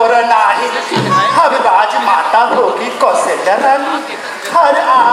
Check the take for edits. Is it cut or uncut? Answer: uncut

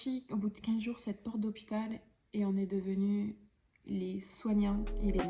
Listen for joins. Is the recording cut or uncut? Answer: uncut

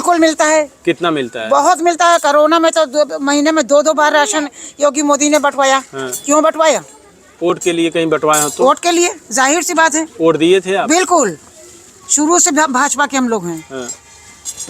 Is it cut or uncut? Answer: uncut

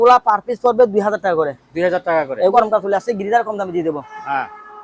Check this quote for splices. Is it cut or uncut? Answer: cut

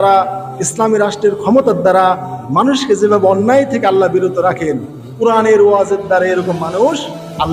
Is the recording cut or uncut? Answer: uncut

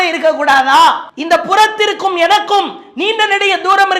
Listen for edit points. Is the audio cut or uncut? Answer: cut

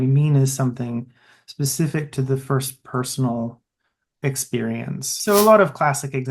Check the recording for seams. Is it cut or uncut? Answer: cut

